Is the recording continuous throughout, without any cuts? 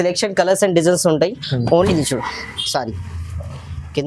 no; 1 cut; at 1.9 s

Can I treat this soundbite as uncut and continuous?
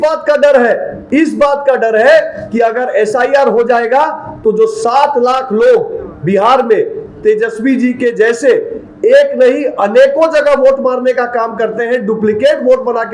no; 1 cut; at 0.9 s

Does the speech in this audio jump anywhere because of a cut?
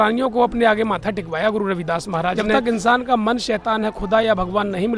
yes; 1 cut; at 2.5 s

